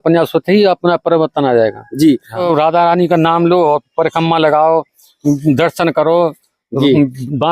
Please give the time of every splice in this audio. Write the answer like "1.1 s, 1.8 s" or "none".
2.4 s